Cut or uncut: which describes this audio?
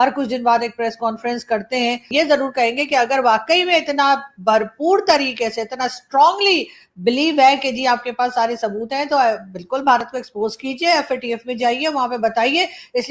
cut